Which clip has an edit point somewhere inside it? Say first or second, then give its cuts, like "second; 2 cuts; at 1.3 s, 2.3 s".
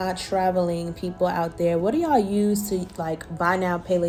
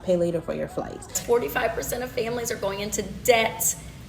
second; 1 cut; at 1.2 s